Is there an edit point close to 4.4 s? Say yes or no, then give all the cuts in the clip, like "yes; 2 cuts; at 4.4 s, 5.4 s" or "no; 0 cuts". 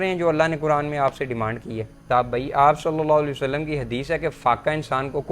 no; 1 cut; at 2.0 s